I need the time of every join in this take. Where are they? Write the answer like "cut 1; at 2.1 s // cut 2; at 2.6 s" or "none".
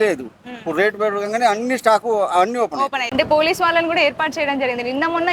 cut 1; at 3.0 s